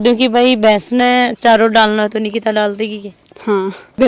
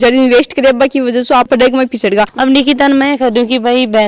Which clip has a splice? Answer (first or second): second